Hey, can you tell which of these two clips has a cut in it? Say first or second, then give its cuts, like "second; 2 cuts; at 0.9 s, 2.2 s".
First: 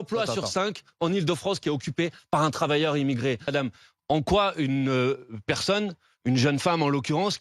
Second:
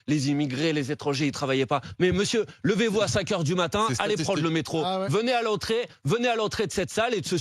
first; 1 cut; at 3.5 s